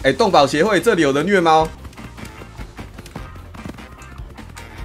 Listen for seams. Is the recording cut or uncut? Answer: uncut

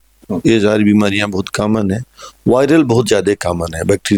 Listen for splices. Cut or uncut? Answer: uncut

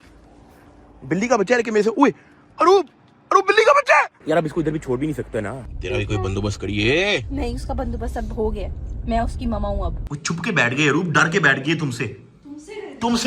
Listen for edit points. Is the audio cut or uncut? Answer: cut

